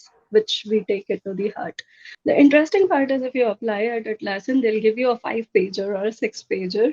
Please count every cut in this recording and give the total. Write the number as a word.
one